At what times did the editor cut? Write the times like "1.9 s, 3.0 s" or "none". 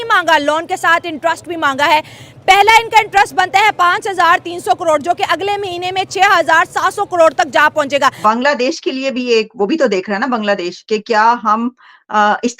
8.2 s